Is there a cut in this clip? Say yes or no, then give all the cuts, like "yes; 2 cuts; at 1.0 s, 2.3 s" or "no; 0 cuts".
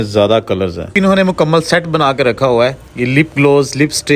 yes; 1 cut; at 0.9 s